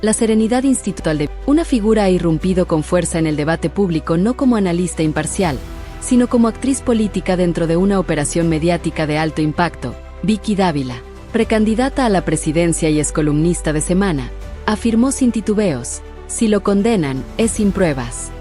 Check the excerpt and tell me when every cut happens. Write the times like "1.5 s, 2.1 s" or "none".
1.0 s